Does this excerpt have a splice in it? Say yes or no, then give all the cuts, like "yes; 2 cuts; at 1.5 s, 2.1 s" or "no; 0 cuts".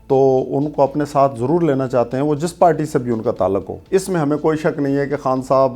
yes; 1 cut; at 3.7 s